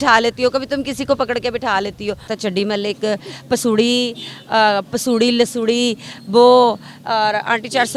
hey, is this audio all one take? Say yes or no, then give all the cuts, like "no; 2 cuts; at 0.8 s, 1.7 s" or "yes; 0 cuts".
no; 1 cut; at 2.3 s